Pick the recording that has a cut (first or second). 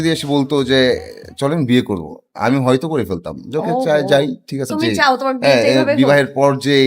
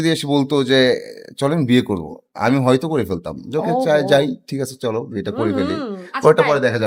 first